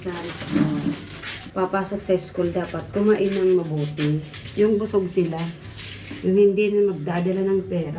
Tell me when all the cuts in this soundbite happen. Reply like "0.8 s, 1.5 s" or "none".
1.4 s